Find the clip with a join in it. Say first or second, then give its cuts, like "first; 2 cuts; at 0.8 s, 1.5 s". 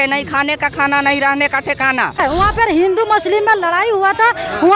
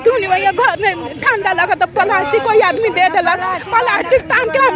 first; 1 cut; at 2.2 s